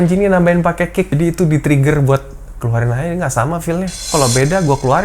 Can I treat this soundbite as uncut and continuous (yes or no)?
no